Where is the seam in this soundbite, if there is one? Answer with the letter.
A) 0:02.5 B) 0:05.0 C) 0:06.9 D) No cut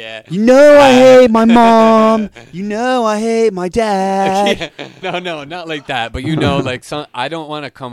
B